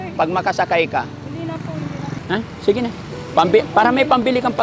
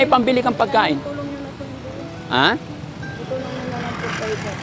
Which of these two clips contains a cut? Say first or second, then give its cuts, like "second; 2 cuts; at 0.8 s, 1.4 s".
first; 1 cut; at 2.2 s